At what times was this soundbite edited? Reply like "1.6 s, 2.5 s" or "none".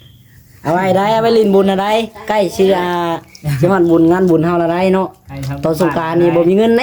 none